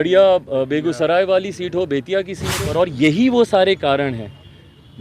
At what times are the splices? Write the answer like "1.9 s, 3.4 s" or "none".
2.7 s